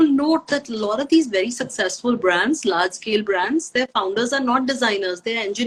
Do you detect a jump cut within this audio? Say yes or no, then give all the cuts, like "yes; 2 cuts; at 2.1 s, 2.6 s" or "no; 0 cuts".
no; 0 cuts